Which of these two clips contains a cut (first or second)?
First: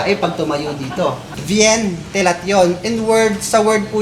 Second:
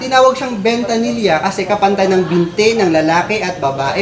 first